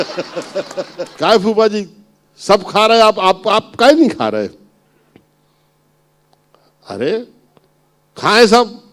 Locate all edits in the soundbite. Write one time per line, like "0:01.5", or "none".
0:01.1